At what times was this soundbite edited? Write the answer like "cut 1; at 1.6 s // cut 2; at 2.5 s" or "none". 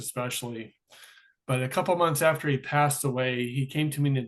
none